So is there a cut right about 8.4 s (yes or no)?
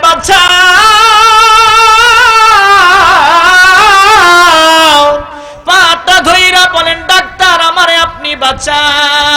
no